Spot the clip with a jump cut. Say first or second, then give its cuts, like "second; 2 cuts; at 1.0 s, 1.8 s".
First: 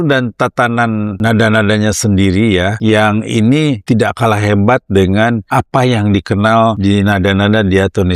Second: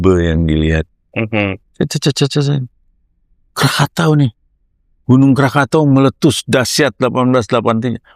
first; 5 cuts; at 1.1 s, 2.8 s, 3.8 s, 5.4 s, 6.8 s